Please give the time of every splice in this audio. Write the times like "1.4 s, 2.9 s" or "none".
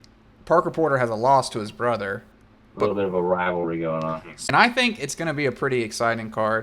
4.4 s